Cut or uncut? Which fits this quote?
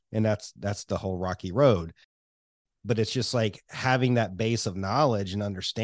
cut